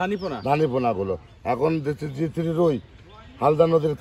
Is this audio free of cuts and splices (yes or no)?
yes